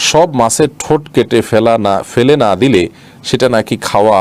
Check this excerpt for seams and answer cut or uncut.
uncut